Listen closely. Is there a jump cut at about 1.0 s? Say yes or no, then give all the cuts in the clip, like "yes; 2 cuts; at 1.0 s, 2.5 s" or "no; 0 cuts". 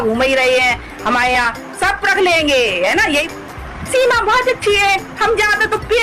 no; 1 cut; at 3.2 s